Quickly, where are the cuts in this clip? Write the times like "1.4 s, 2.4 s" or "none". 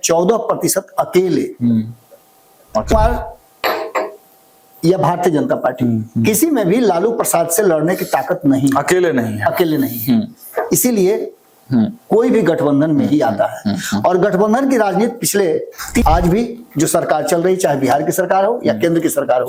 2.9 s, 16.0 s